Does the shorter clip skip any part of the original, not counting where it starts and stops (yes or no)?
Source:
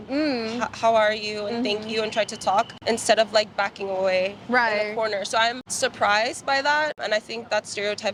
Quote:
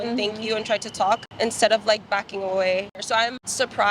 yes